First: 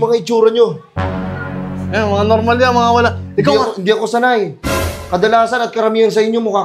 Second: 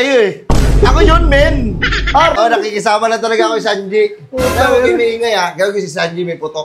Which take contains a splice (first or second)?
second